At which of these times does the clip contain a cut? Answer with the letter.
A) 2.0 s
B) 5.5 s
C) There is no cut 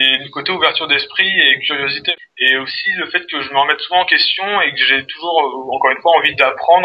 A